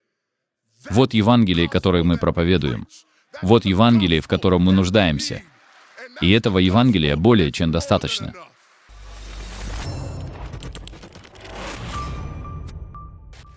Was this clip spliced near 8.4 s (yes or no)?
yes